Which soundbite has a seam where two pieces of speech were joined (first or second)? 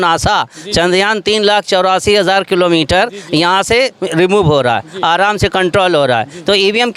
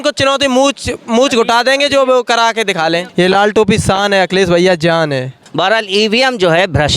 second